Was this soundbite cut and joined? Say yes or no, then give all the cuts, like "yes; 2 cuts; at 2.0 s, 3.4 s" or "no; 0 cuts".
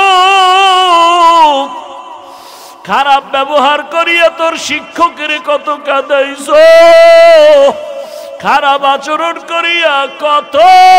no; 0 cuts